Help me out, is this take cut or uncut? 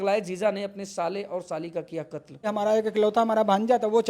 cut